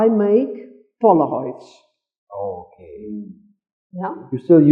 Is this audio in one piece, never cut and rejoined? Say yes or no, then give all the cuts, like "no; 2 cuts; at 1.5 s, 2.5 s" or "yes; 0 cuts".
yes; 0 cuts